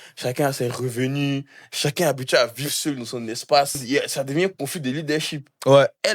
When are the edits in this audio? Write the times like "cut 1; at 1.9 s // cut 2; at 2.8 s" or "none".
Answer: cut 1; at 3.8 s